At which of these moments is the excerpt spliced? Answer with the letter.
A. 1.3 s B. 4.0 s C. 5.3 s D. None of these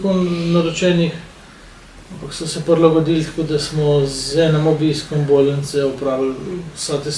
D